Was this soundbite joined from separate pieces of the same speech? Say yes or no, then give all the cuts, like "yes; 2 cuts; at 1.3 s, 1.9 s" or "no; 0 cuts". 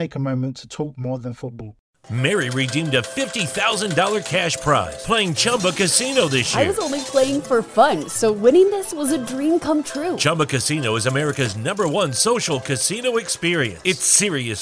yes; 1 cut; at 1.7 s